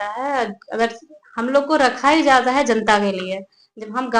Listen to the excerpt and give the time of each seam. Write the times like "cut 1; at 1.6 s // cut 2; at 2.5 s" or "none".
none